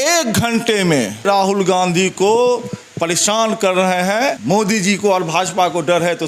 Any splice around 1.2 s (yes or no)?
yes